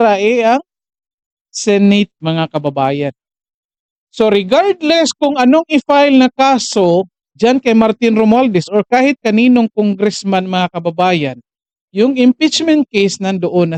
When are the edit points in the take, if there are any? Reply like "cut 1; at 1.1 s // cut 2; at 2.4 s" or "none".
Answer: none